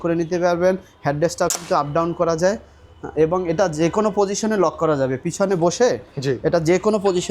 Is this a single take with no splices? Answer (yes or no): yes